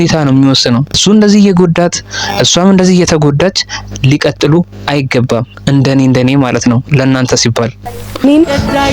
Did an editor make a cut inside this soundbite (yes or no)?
yes